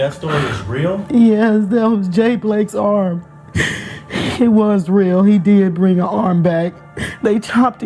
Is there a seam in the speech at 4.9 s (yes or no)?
no